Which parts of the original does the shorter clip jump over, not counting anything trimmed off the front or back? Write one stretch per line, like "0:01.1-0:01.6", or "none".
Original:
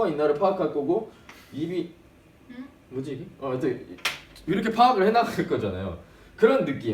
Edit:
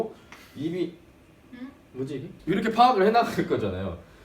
0:03.3-0:04.3